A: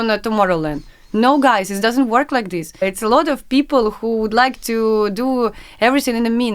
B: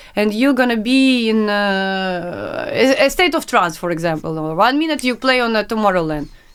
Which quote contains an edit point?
A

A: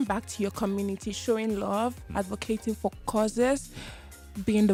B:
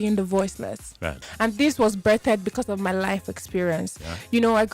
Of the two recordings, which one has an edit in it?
B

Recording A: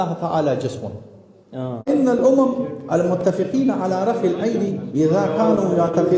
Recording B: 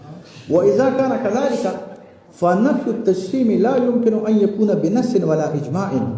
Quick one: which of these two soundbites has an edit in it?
A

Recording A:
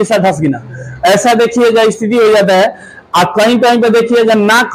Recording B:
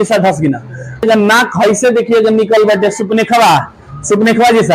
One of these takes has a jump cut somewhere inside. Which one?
B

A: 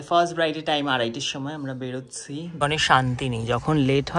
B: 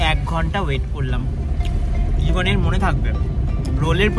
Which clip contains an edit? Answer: A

